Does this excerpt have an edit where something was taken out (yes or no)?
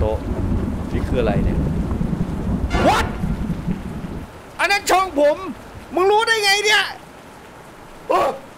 yes